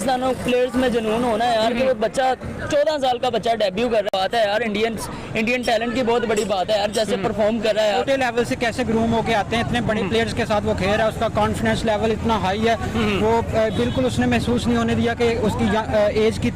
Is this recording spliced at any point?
yes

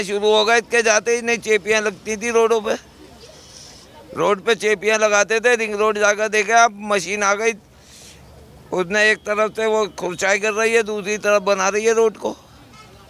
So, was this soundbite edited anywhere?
no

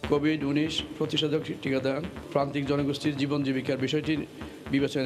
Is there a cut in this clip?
yes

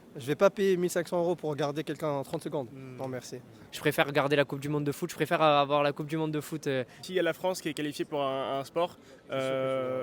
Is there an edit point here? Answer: no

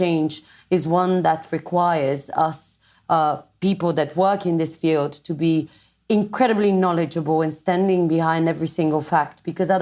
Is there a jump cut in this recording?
no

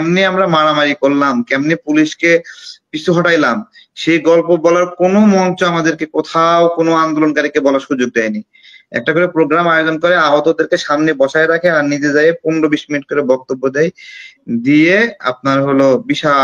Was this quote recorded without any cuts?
yes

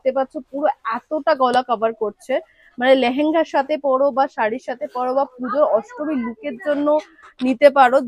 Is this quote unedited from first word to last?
yes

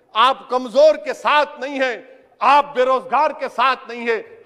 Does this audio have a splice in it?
no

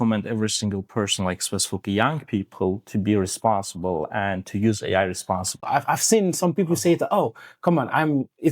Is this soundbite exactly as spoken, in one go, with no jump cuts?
no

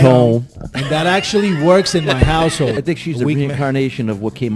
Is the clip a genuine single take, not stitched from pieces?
no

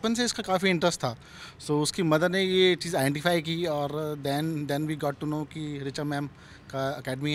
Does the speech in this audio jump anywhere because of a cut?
no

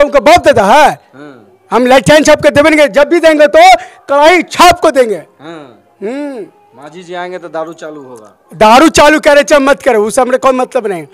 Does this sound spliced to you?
no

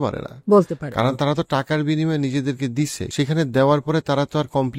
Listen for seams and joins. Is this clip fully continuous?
no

